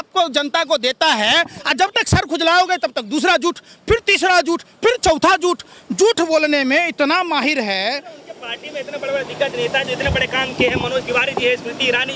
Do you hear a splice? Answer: no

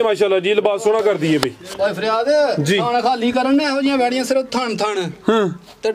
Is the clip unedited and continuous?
yes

